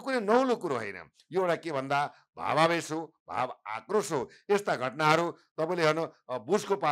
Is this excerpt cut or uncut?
uncut